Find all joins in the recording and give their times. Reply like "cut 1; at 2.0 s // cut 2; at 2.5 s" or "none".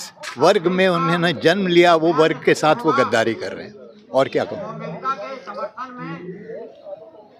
none